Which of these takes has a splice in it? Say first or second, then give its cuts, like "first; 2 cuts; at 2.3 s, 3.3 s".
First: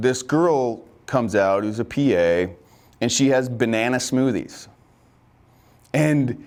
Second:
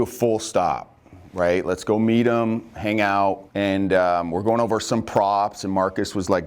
second; 1 cut; at 3.4 s